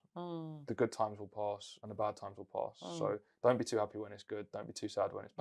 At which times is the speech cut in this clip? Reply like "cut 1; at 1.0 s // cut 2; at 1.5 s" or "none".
none